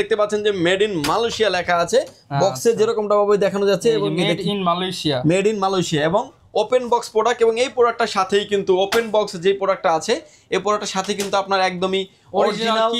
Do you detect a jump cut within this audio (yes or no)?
no